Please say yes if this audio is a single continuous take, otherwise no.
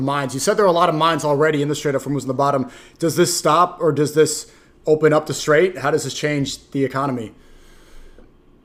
yes